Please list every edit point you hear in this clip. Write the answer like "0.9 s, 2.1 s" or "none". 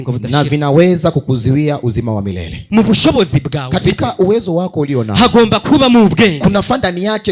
2.5 s